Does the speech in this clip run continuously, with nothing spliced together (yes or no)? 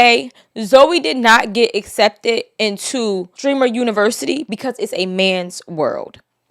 no